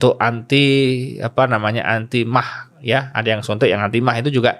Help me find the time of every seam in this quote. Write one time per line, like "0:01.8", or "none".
none